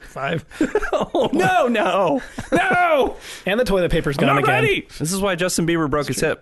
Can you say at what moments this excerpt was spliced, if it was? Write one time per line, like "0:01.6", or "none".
0:04.9